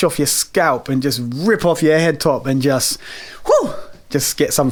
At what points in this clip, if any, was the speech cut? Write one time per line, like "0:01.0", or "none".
none